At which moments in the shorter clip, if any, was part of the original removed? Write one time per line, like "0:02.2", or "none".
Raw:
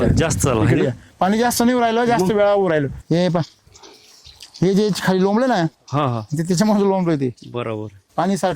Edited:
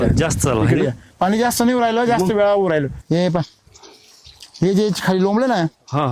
none